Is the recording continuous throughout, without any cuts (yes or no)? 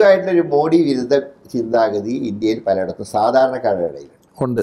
yes